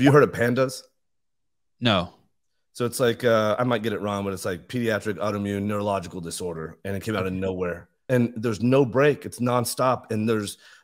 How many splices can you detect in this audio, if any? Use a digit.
1